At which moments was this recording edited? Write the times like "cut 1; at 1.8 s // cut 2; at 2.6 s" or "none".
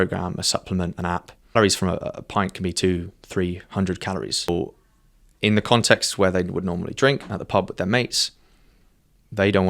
cut 1; at 1.5 s // cut 2; at 4.5 s